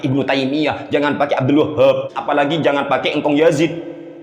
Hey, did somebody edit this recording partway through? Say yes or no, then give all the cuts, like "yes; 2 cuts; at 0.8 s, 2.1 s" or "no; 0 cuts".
yes; 1 cut; at 2.2 s